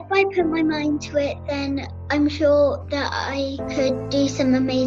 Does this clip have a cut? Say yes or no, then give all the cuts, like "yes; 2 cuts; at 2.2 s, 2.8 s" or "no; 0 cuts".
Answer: yes; 2 cuts; at 1.9 s, 3.6 s